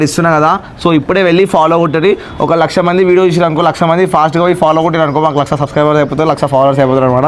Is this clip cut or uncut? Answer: uncut